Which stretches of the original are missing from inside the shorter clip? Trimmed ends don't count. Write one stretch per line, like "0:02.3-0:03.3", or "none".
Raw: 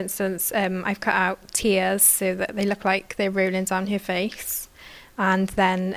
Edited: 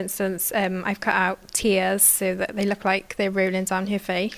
none